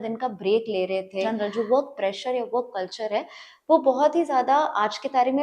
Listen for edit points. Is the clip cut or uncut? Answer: cut